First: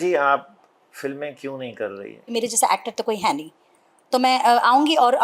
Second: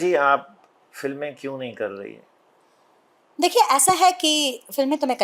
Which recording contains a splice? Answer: first; 1 cut; at 2.2 s

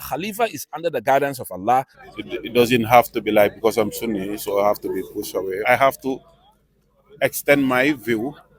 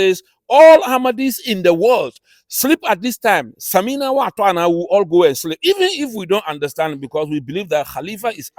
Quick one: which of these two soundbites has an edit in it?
first; 2 cuts; at 2.0 s, 5.6 s

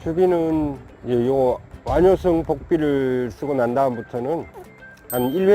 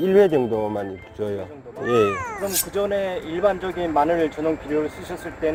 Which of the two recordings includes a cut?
first; 2 cuts; at 0.9 s, 1.7 s

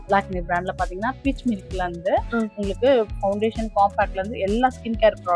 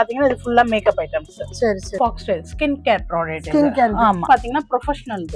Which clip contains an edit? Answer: second; 2 cuts; at 1.9 s, 4.3 s

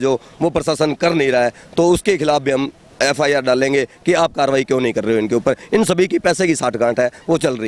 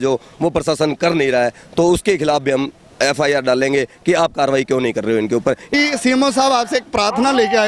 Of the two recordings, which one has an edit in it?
second; 1 cut; at 5.7 s

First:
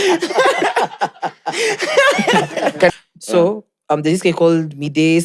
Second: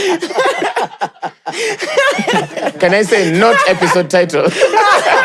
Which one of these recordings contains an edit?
first; 1 cut; at 2.9 s

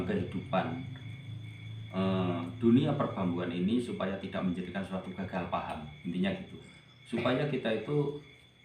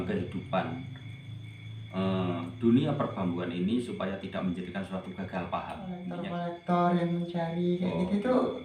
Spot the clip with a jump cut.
second; 1 cut; at 6.1 s

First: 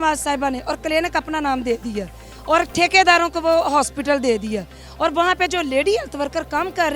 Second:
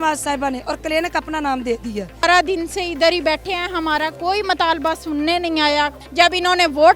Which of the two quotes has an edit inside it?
second; 2 cuts; at 2.2 s, 6.0 s

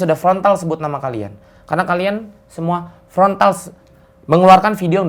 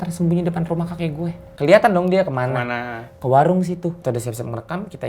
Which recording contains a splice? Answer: second; 2 cuts; at 1.4 s, 4.0 s

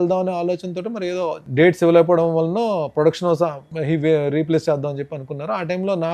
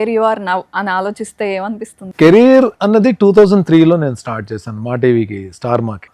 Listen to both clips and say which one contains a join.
second; 1 cut; at 2.0 s

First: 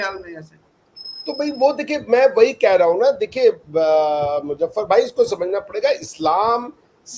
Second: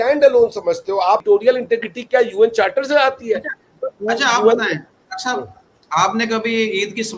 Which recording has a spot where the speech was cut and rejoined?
second; 1 cut; at 1.2 s

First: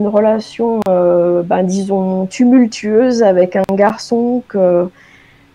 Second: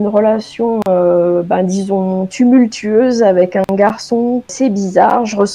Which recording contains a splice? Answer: second; 1 cut; at 4.5 s

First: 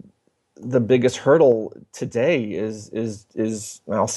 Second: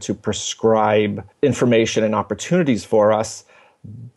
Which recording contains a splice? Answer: second; 1 cut; at 1.3 s

